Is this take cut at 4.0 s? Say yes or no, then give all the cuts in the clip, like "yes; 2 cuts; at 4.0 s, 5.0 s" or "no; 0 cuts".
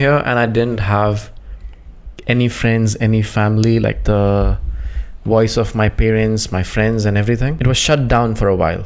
yes; 2 cuts; at 4.0 s, 7.6 s